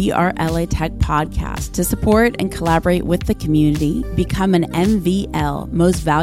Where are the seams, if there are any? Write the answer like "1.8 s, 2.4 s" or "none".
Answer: none